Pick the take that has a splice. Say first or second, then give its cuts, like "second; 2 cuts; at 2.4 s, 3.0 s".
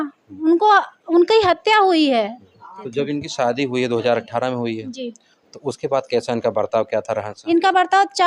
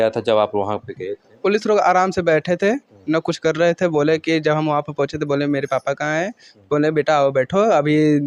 first; 1 cut; at 2.8 s